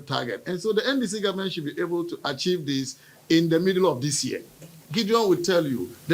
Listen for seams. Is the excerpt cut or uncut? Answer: cut